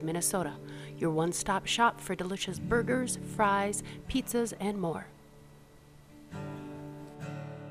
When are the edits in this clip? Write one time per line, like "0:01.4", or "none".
0:05.1